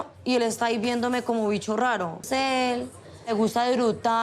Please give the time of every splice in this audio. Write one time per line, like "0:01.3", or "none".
0:02.2